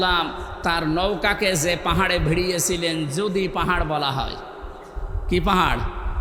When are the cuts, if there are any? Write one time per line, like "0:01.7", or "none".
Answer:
none